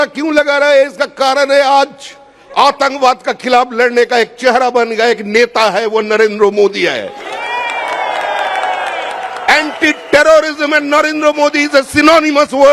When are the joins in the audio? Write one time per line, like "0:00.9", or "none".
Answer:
none